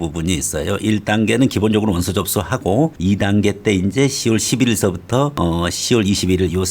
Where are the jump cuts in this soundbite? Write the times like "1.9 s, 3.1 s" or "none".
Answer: none